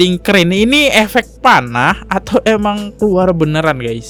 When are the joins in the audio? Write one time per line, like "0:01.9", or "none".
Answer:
none

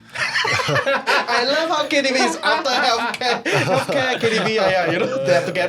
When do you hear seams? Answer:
none

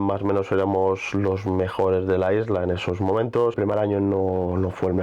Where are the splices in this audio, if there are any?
0:03.5

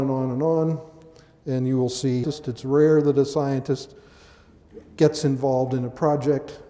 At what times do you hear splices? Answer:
none

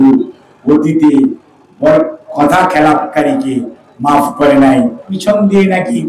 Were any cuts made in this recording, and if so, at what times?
0:05.1

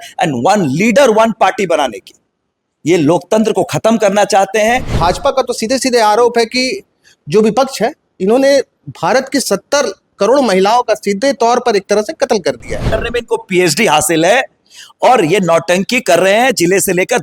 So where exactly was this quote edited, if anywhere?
0:04.9
0:12.8

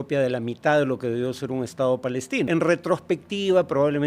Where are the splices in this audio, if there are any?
0:02.5

